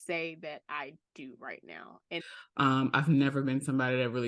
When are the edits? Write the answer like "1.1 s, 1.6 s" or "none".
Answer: 2.1 s